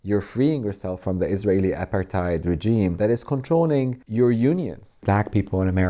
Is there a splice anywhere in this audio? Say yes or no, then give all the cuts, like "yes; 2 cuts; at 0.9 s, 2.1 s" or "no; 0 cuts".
yes; 3 cuts; at 3.0 s, 4.0 s, 5.0 s